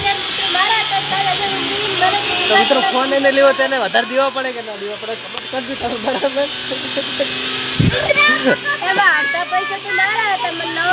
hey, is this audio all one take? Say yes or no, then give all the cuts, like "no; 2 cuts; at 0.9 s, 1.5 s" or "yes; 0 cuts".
yes; 0 cuts